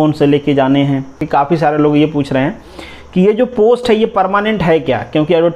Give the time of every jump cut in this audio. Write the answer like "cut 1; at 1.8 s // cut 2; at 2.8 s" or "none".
cut 1; at 1.2 s